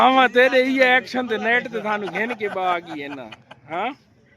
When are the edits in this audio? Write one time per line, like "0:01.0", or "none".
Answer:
none